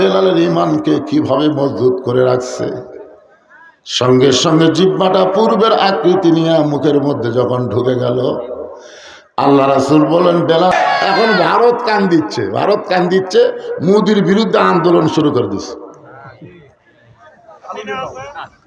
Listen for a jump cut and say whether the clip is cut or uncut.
cut